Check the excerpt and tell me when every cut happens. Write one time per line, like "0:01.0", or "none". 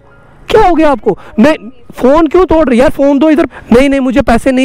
0:03.6